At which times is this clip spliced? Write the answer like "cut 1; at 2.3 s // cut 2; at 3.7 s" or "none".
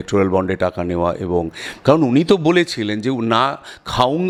none